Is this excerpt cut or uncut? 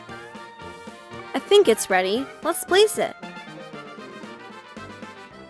cut